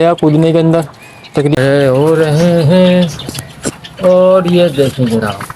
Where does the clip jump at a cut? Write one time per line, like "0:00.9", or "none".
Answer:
0:01.6

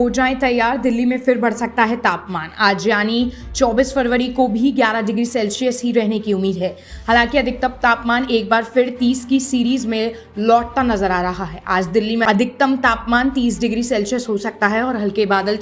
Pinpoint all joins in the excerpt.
0:12.2

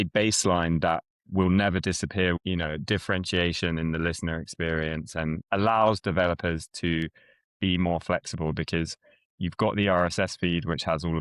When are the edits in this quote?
0:02.4
0:05.4

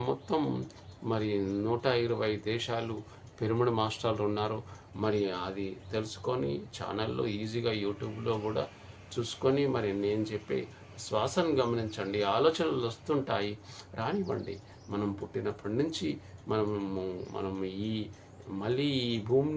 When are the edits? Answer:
none

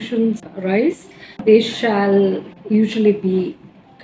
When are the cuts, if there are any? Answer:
0:02.5

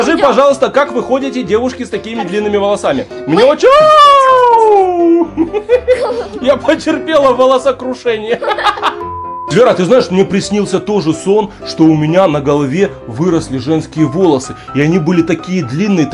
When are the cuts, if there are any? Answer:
0:09.5

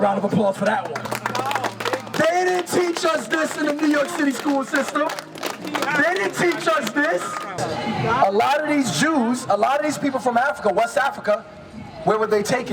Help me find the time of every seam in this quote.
0:07.6

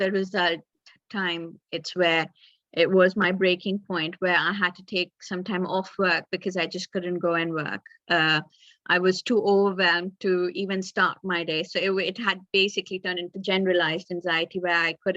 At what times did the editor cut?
none

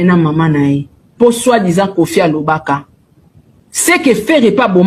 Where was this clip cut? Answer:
none

